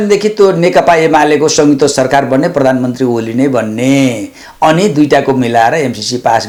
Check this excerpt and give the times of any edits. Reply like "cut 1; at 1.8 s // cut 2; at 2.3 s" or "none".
none